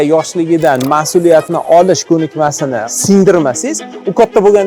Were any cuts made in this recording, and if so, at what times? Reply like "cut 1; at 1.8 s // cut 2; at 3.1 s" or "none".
cut 1; at 2.7 s